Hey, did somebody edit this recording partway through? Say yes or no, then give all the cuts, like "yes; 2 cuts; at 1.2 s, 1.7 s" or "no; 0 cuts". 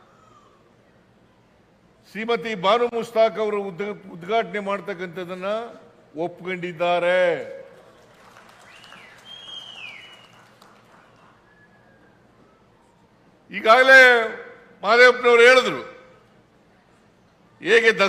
no; 0 cuts